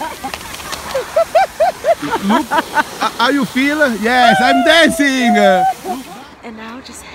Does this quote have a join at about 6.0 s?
yes; 1 cut; at 6.0 s

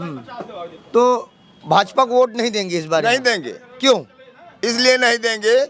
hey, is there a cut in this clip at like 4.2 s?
no; 0 cuts

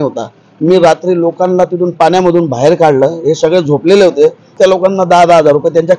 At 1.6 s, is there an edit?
no; 1 cut; at 4.5 s

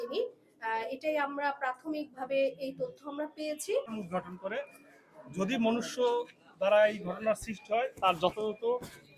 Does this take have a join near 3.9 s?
yes; 1 cut; at 3.9 s

